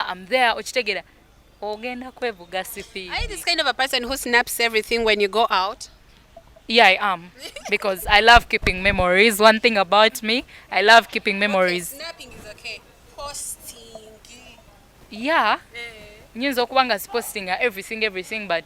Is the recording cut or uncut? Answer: uncut